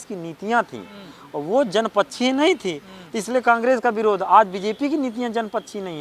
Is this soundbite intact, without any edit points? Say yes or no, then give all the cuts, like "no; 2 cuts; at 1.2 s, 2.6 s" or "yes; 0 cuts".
yes; 0 cuts